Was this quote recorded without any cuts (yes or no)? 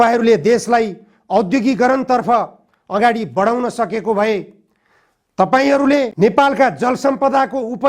no